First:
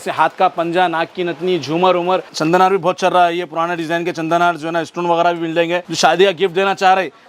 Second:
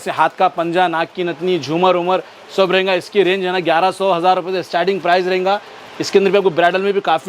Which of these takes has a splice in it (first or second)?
first